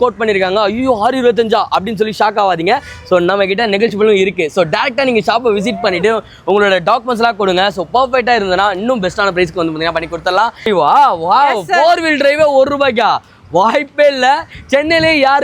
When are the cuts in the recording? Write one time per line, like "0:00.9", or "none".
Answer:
0:10.7